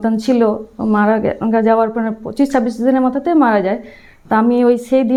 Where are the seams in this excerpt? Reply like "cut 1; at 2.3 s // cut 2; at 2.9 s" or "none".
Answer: none